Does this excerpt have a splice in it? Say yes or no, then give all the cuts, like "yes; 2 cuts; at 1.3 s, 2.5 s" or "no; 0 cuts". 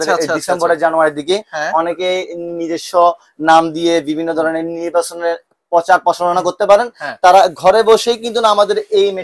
no; 0 cuts